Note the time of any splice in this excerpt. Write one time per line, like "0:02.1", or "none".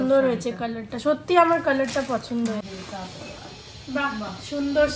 0:02.6